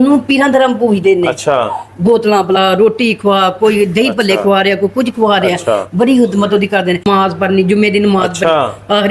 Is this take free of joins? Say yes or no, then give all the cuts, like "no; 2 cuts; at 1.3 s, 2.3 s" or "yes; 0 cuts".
no; 1 cut; at 7.1 s